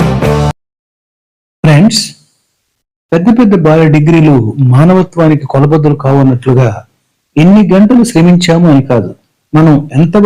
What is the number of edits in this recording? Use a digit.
0